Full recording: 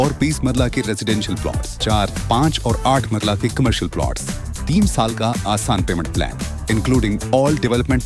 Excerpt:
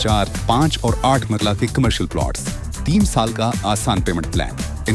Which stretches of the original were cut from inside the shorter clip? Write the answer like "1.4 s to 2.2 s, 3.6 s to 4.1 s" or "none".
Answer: none